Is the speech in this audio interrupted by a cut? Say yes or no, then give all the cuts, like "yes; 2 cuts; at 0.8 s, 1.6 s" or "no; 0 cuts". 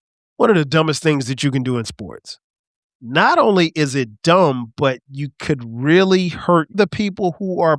yes; 1 cut; at 6.8 s